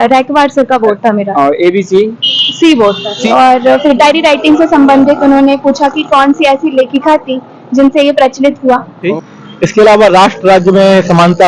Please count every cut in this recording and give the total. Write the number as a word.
three